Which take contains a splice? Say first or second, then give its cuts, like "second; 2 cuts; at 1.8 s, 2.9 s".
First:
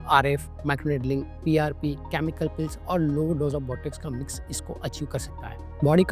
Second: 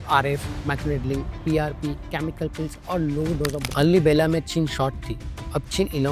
second; 1 cut; at 3.6 s